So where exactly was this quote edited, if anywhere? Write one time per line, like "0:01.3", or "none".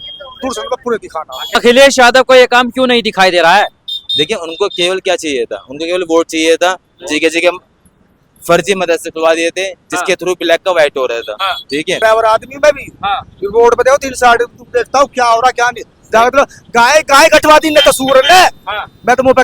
0:01.6
0:11.9